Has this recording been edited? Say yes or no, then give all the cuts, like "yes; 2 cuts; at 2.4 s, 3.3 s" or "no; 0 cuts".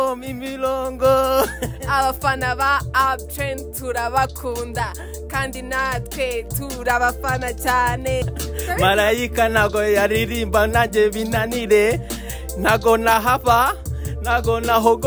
yes; 1 cut; at 8.4 s